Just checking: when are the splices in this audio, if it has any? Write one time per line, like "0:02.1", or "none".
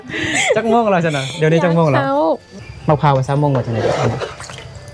0:02.5